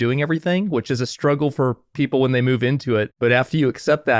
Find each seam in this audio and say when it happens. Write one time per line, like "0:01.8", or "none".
0:03.1